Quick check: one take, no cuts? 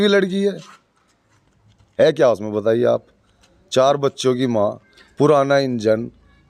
yes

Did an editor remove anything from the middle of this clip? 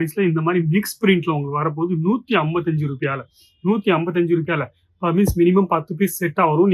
no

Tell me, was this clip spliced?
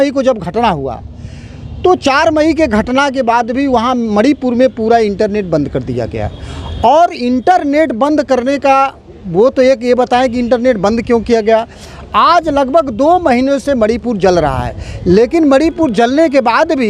no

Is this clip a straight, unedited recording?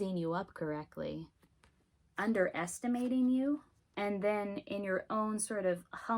no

